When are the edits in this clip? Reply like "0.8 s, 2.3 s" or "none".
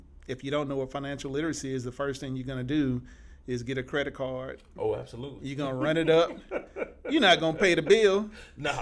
none